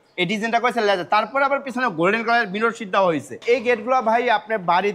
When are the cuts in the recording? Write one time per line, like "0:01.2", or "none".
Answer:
0:03.4